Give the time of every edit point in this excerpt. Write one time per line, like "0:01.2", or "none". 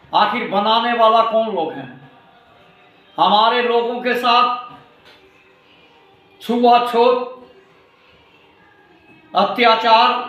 none